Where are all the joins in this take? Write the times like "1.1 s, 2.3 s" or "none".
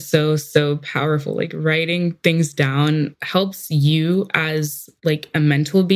3.2 s